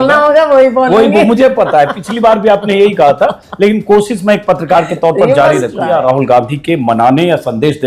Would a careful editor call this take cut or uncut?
cut